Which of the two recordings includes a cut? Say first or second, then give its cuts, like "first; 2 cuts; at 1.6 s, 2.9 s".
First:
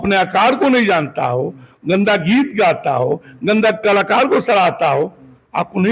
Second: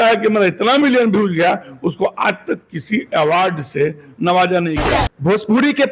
second; 1 cut; at 4.8 s